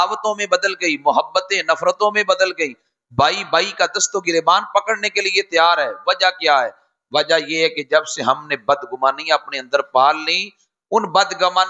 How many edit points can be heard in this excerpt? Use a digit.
0